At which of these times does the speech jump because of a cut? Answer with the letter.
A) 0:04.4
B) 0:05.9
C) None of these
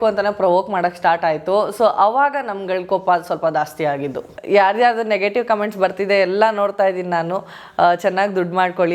A